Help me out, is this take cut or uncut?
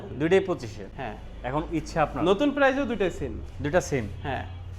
uncut